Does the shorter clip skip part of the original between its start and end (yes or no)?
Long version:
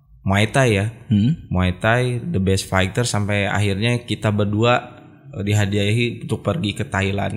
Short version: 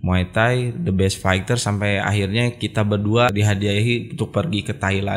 yes